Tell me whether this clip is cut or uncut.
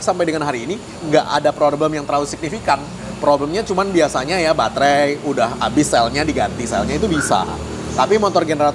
cut